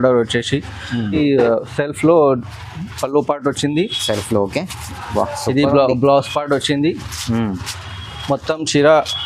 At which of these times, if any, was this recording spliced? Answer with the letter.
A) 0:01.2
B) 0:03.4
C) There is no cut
A